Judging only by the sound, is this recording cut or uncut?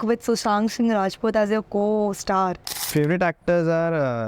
cut